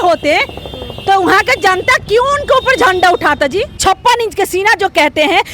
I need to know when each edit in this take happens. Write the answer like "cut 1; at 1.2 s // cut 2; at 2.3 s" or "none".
cut 1; at 3.8 s